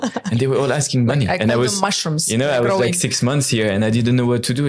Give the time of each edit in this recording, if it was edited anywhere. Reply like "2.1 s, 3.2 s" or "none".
none